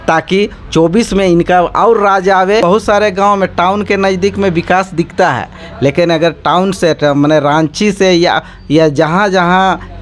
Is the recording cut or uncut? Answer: cut